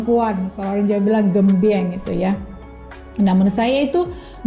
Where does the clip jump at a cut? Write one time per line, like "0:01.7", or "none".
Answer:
none